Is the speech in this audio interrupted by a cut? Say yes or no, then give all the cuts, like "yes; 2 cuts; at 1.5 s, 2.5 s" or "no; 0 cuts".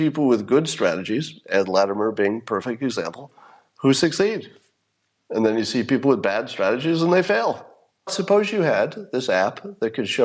yes; 1 cut; at 8.2 s